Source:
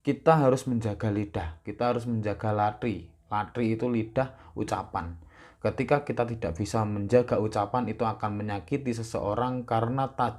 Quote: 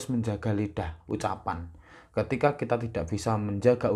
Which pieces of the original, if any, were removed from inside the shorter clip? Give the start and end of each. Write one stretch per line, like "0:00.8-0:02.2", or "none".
0:01.5-0:04.4